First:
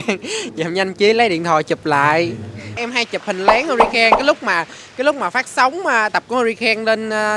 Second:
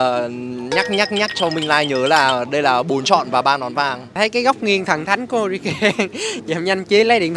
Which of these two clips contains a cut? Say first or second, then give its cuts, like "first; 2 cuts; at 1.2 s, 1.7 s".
second; 1 cut; at 4.1 s